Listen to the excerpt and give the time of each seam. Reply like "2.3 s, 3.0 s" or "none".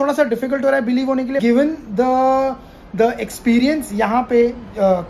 1.4 s